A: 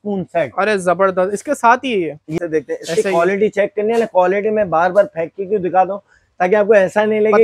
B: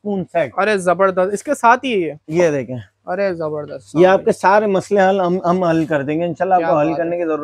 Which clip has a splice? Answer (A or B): A